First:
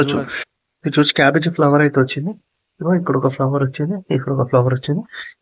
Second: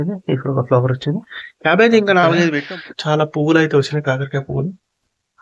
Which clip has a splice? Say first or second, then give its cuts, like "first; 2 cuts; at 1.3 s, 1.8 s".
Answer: second; 1 cut; at 2.6 s